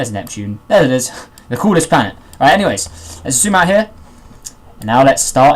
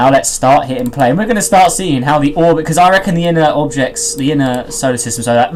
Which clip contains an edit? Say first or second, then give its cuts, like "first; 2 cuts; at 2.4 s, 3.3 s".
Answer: first; 1 cut; at 2.1 s